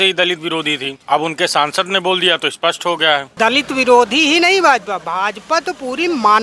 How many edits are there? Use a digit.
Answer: 2